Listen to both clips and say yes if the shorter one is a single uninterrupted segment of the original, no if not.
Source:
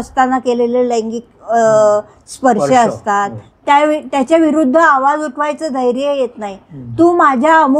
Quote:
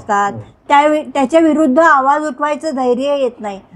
yes